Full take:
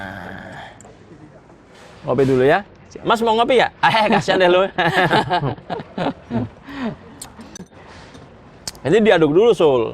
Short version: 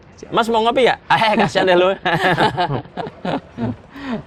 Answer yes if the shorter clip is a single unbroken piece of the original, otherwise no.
yes